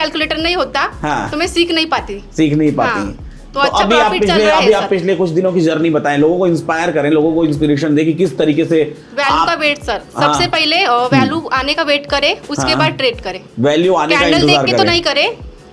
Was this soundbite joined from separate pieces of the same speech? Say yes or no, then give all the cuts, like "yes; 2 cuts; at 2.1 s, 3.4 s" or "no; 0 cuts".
no; 0 cuts